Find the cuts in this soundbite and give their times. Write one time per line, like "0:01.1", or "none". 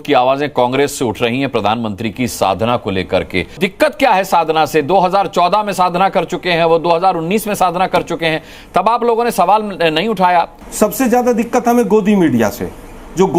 0:03.6
0:10.6